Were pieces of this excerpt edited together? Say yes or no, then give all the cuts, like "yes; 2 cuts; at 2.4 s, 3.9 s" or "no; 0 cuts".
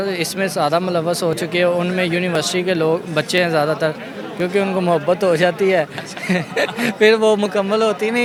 no; 0 cuts